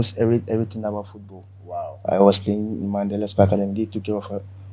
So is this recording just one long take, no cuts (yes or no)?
no